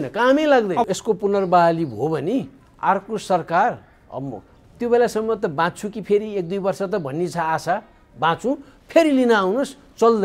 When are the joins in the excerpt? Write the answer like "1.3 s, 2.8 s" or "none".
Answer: 0.9 s